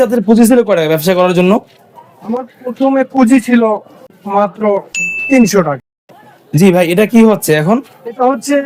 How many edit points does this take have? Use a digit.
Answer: 0